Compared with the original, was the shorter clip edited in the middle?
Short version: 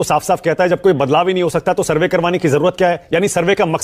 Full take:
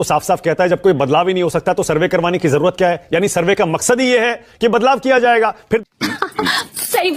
no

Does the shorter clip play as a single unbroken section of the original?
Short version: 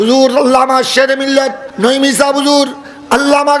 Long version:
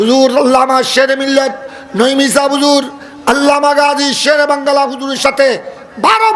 no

